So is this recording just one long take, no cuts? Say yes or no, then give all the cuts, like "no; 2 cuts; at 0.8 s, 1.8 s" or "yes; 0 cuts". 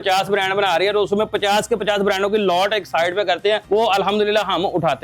no; 1 cut; at 3.6 s